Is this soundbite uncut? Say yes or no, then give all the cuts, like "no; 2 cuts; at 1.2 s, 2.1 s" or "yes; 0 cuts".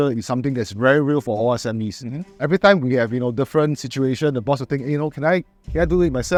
yes; 0 cuts